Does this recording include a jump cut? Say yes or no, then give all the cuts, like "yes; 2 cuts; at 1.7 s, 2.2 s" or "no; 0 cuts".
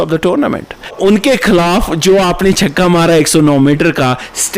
yes; 1 cut; at 1.0 s